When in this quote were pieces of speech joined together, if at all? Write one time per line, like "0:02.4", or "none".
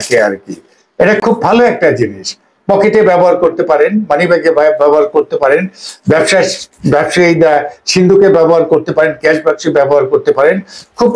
none

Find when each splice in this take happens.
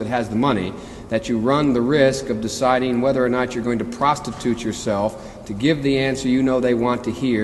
none

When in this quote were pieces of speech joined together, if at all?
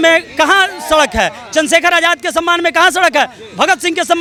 none

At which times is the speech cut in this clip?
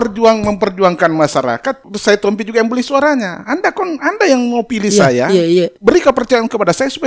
0:01.9
0:05.7

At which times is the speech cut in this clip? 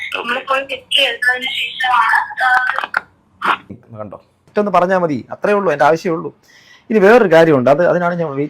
0:03.7

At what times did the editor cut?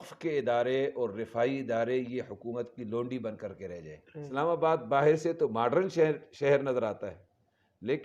0:04.2

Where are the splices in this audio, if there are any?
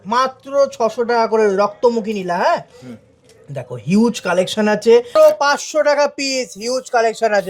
0:05.1

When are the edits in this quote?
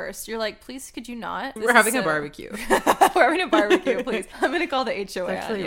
0:01.6
0:04.3

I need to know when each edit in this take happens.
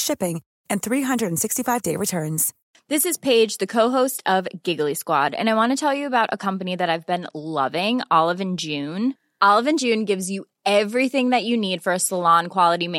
0:02.5

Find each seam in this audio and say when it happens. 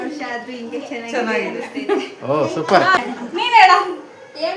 0:03.1

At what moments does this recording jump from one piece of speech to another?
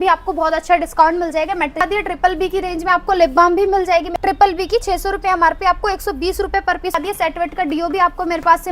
0:01.8
0:04.1
0:06.9

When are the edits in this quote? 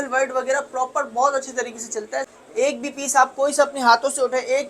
0:02.3

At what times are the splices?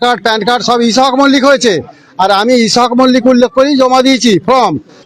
none

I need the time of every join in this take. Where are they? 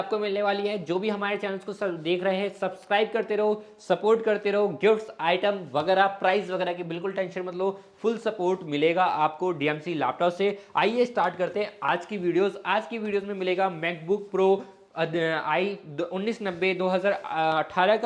none

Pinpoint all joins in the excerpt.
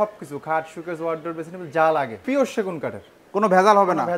0:02.2

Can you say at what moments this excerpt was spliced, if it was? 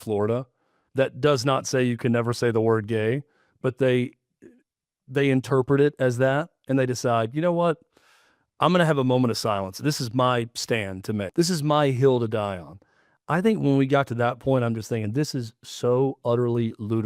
0:11.3

